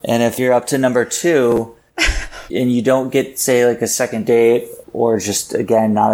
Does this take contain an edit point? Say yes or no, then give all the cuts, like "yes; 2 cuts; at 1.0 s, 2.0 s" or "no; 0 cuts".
yes; 1 cut; at 1.8 s